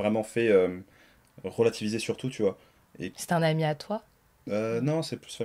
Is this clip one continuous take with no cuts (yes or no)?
yes